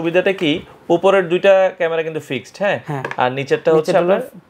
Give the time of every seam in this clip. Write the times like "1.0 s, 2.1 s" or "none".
none